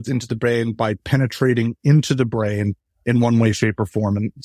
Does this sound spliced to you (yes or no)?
yes